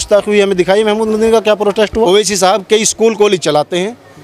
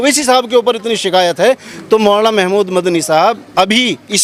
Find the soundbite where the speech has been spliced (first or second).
first